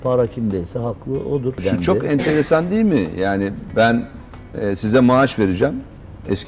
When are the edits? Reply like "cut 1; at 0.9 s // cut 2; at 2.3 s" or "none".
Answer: none